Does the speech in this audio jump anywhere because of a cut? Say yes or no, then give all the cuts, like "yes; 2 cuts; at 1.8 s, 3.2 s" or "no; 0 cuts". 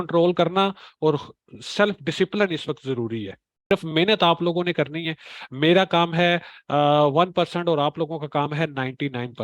yes; 1 cut; at 3.7 s